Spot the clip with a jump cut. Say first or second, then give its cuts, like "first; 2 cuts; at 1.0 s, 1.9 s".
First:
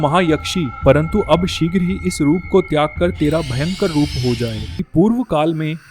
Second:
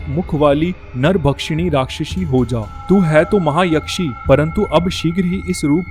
first; 1 cut; at 4.8 s